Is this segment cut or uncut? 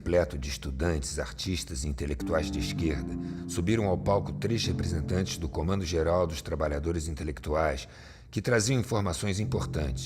cut